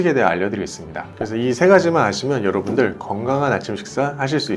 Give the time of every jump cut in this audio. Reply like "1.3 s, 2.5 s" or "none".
none